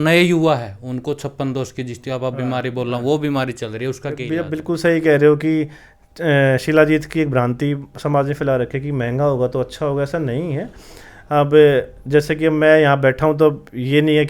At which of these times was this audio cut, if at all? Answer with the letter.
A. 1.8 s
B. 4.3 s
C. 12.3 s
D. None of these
B